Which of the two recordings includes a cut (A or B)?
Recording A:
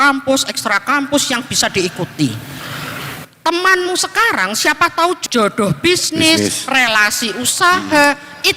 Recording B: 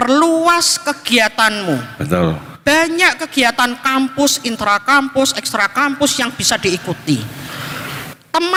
A